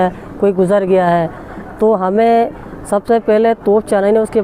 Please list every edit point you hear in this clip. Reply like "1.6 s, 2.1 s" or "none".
none